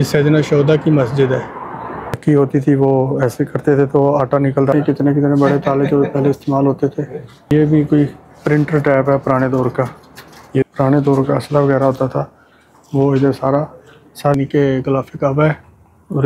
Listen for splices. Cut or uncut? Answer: cut